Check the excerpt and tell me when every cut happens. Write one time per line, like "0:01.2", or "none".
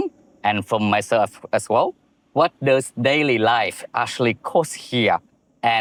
none